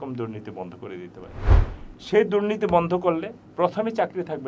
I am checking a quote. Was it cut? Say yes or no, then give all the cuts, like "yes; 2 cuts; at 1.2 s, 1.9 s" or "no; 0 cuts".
yes; 1 cut; at 1.5 s